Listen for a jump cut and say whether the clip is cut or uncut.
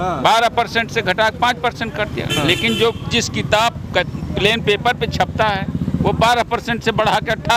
uncut